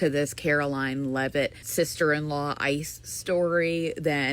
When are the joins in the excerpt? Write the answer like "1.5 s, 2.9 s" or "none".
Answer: 1.6 s